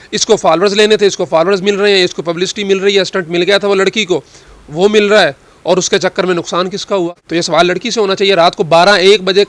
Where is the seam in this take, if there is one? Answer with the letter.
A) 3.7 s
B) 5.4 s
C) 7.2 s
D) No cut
C